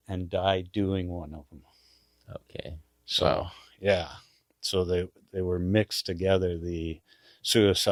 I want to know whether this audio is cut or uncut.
uncut